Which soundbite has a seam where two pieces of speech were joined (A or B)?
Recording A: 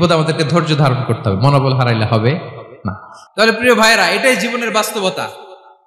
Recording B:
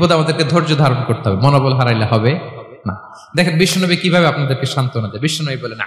A